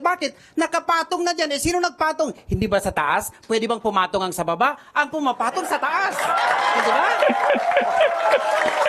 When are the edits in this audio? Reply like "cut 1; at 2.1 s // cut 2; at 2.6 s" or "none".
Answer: none